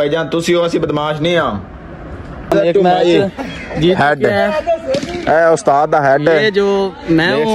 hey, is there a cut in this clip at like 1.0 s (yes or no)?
no